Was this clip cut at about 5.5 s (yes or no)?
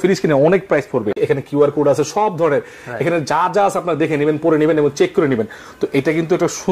no